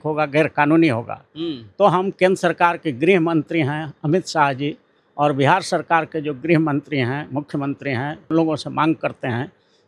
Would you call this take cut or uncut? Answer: cut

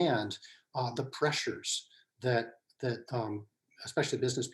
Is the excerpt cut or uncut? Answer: uncut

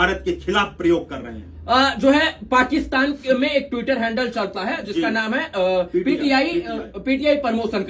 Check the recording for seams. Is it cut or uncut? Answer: uncut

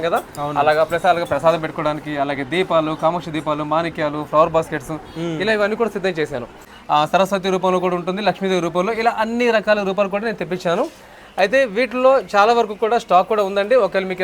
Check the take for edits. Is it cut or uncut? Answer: cut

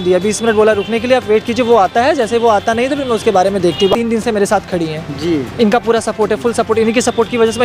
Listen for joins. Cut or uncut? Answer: cut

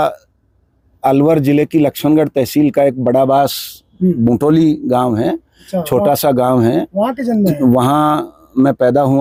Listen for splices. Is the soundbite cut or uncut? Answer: uncut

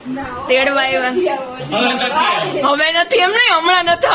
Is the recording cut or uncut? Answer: uncut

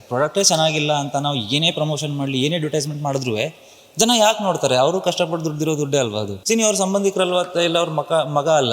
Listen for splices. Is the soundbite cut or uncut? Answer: cut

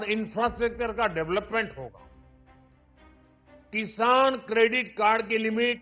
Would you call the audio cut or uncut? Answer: uncut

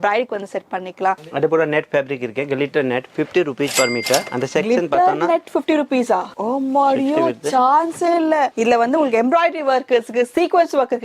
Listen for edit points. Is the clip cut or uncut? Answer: cut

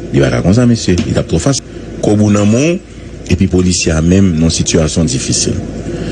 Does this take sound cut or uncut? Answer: cut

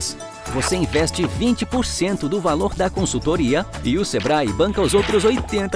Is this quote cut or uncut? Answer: uncut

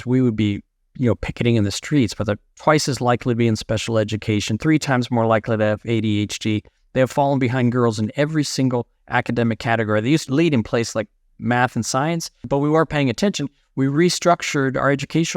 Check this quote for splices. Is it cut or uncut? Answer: cut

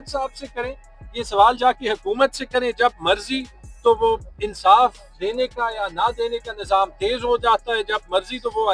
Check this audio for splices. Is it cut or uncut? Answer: uncut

